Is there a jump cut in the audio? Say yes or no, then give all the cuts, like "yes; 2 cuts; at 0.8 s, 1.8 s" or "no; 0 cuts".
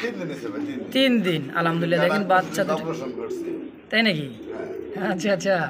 no; 0 cuts